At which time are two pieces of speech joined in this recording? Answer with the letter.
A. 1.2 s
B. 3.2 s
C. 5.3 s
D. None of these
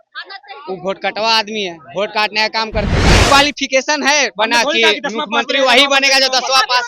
B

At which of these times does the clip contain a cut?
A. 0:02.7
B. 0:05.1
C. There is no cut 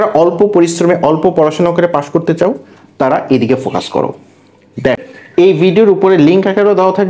B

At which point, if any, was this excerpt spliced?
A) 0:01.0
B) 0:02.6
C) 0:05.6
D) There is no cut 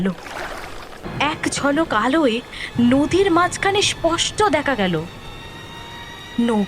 A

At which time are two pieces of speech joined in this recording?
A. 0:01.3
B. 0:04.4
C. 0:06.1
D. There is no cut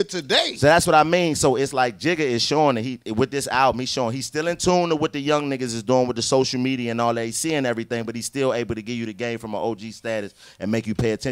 D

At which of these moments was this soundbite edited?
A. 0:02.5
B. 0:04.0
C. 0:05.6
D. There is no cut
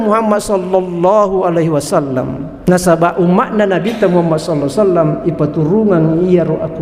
A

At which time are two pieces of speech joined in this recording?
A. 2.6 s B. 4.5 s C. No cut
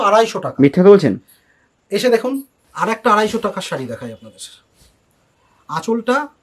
A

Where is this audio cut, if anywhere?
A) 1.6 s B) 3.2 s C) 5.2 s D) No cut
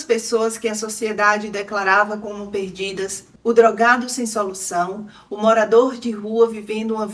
B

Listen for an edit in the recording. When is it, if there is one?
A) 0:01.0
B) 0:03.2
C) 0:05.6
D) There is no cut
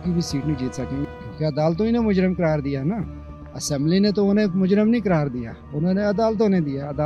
A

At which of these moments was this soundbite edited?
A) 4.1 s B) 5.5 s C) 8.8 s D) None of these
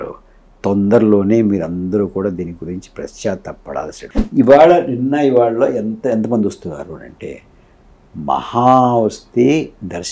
A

